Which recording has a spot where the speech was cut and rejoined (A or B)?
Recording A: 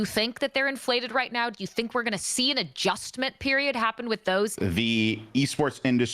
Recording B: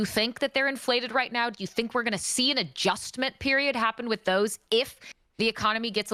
A